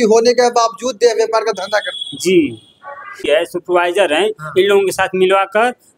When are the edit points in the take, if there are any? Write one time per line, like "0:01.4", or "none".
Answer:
0:03.2